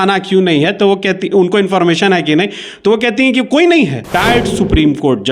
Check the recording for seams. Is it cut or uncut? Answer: cut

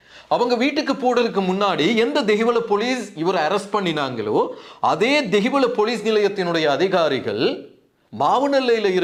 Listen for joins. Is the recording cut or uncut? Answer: uncut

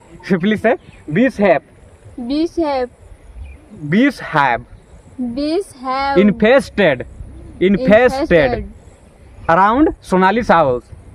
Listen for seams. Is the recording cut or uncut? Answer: uncut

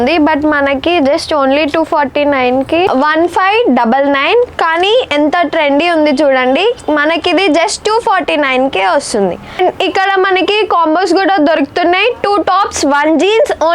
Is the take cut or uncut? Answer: cut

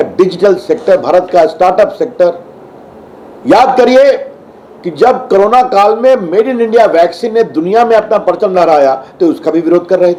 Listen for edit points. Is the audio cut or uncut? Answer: uncut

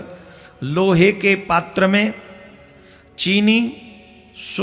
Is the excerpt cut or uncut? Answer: uncut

